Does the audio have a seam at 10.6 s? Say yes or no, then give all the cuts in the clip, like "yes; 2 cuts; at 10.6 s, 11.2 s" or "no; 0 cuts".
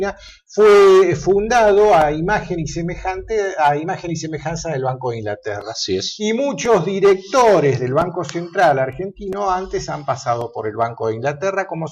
yes; 1 cut; at 10.6 s